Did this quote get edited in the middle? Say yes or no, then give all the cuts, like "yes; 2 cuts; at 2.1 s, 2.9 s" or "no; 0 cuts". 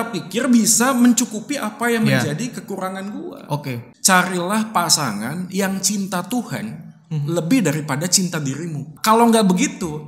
yes; 2 cuts; at 3.9 s, 8.9 s